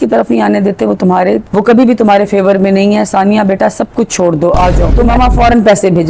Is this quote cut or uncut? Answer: cut